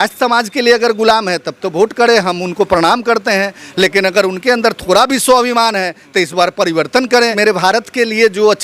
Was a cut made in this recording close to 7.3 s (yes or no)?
yes